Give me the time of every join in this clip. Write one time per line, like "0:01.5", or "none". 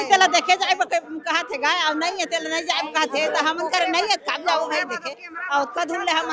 none